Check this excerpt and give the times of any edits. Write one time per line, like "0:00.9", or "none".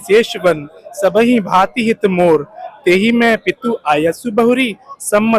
none